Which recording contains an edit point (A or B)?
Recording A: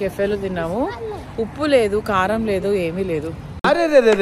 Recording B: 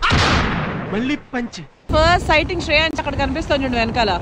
B